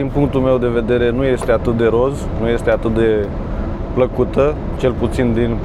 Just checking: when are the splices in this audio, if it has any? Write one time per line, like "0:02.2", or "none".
none